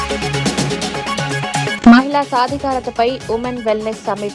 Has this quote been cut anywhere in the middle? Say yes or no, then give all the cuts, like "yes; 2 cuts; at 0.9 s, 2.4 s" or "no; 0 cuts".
yes; 1 cut; at 1.8 s